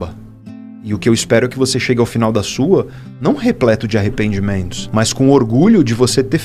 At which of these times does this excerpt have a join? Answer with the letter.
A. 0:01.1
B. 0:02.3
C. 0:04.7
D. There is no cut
C